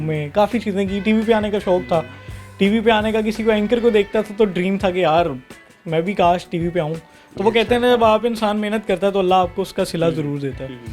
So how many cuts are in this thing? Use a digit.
0